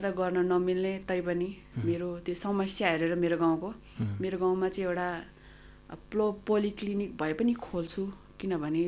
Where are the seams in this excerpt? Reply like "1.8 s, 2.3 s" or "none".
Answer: none